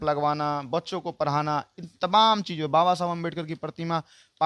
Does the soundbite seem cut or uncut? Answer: uncut